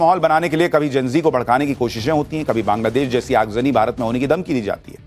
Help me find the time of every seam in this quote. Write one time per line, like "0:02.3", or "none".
none